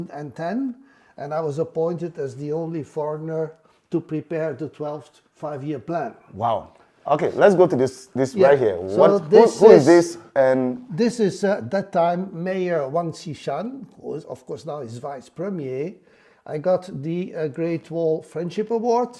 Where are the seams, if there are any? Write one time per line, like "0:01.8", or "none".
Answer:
none